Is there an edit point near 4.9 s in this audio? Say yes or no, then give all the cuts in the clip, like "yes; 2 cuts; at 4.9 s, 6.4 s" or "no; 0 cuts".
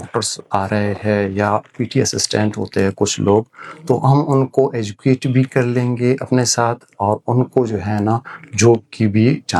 no; 0 cuts